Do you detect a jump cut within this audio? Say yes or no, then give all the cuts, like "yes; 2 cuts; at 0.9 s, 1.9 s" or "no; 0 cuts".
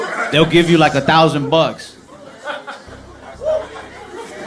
no; 0 cuts